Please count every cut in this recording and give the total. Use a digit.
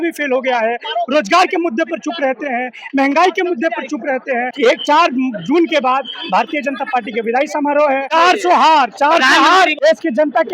3